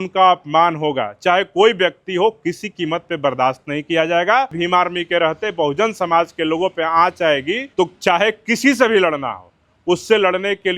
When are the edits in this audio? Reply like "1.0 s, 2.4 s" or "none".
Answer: 4.6 s, 7.6 s